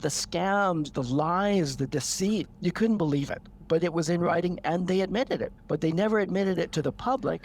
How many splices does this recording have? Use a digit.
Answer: 2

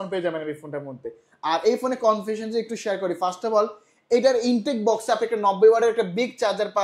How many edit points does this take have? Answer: 0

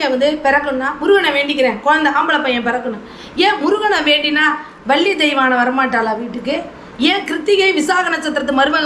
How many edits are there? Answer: 0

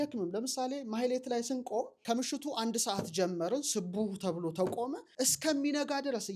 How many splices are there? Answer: 2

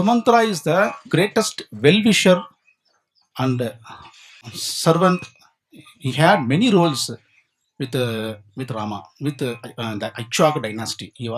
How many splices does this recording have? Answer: 1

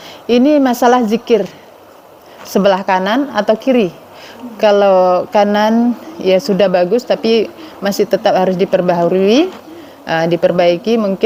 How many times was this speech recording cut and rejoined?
0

